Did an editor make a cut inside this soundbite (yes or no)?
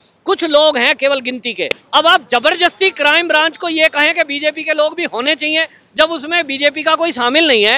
yes